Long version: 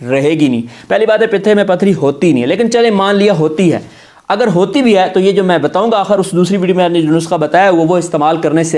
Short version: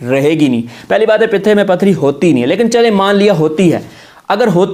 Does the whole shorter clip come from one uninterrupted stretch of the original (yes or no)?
yes